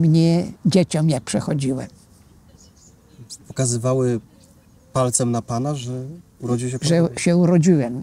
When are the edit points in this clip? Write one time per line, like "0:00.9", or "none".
none